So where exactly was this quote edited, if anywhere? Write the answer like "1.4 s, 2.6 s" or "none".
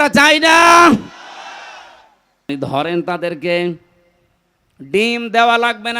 2.5 s